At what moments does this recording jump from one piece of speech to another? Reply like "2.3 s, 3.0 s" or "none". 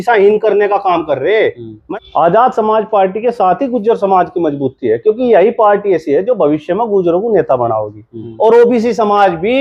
1.7 s, 8.2 s